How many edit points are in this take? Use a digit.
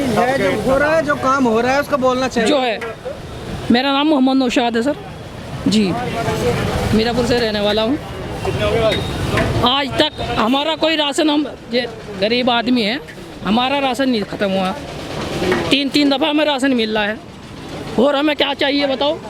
0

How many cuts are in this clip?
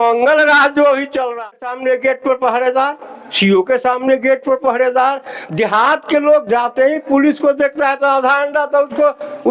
0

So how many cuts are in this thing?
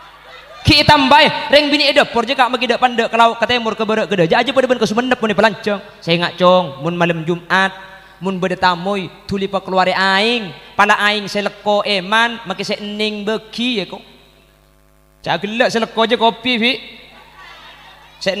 1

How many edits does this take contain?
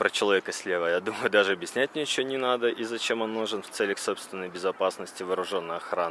0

